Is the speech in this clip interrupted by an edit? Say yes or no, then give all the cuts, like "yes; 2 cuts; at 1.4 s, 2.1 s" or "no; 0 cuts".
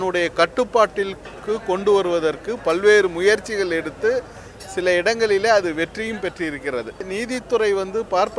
yes; 1 cut; at 7.1 s